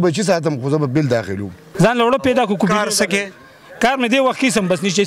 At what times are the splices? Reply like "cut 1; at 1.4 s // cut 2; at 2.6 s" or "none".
cut 1; at 1.6 s